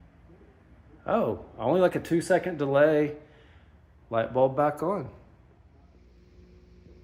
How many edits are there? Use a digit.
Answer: 1